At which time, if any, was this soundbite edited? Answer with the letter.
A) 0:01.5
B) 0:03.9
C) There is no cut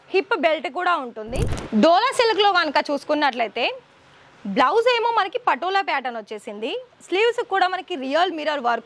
A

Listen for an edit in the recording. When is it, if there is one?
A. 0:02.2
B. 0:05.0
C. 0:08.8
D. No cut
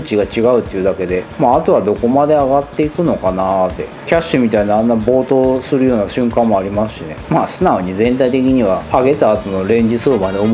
C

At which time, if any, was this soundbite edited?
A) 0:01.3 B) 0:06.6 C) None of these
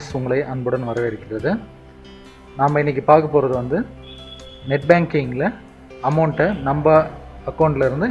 B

